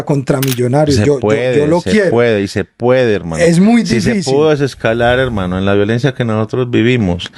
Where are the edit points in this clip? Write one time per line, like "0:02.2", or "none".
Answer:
none